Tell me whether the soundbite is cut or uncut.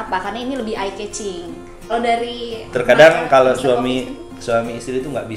cut